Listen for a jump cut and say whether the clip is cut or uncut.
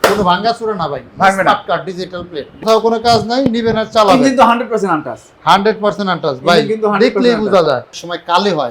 cut